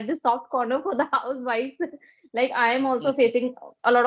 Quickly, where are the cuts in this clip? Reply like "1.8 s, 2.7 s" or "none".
none